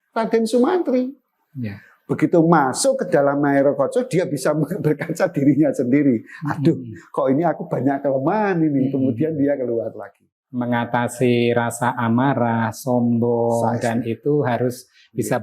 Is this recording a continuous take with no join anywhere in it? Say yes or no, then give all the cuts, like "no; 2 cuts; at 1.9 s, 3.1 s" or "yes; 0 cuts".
no; 1 cut; at 10.6 s